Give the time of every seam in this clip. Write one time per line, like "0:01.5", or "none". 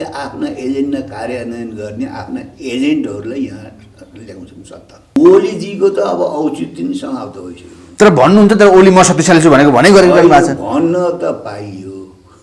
0:05.1